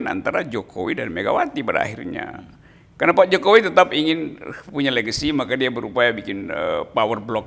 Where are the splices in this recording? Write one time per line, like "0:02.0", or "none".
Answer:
none